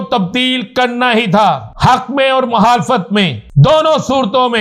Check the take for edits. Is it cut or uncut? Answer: cut